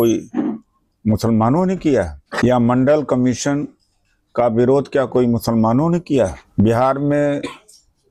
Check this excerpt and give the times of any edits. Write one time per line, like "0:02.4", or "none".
0:02.2
0:06.4